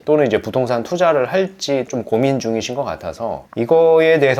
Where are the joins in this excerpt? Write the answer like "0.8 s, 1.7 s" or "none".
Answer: 1.9 s